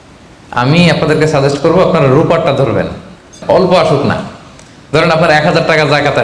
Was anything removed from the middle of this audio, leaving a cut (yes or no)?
yes